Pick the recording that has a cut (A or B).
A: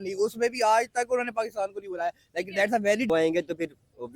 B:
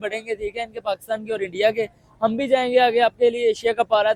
A